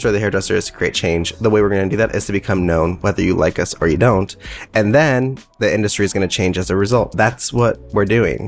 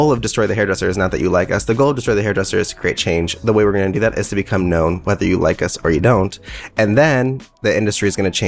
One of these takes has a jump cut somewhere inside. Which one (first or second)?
first